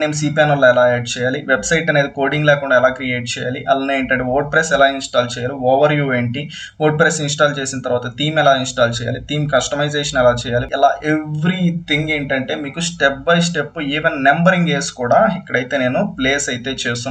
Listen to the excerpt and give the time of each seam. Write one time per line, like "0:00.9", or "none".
0:10.7